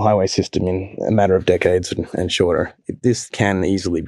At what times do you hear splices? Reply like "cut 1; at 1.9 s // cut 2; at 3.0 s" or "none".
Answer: cut 1; at 3.1 s